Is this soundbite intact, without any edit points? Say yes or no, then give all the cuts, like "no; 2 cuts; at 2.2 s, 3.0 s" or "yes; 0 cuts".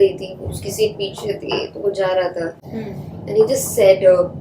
yes; 0 cuts